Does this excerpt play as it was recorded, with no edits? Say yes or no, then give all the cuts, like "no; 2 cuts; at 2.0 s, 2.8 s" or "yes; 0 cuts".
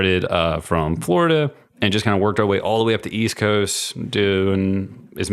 yes; 0 cuts